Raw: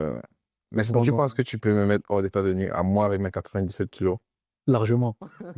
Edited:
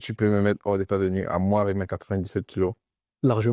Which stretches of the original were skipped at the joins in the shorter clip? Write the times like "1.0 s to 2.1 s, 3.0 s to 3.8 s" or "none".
none